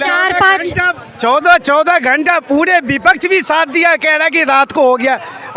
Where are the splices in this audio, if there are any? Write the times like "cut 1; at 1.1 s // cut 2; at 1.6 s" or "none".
none